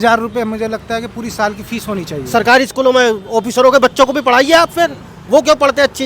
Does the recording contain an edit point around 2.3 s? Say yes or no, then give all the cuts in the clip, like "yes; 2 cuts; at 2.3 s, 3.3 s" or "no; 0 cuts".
yes; 1 cut; at 2.3 s